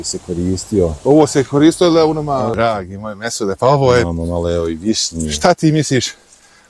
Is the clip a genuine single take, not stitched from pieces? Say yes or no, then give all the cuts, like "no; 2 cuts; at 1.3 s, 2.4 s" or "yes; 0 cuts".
no; 1 cut; at 2.5 s